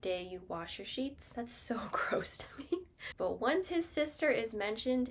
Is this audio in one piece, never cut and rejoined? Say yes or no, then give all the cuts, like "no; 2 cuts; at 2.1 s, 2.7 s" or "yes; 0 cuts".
no; 2 cuts; at 1.2 s, 3.1 s